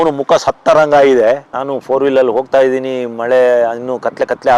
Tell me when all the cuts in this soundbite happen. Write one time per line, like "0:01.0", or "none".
0:01.5